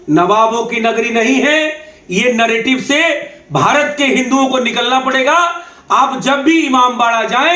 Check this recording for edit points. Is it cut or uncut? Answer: uncut